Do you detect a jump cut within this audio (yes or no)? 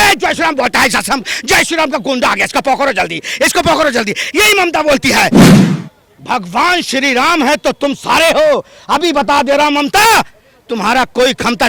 no